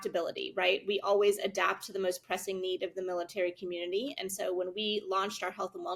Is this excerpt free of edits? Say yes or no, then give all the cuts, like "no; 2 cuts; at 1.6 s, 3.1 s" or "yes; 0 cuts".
yes; 0 cuts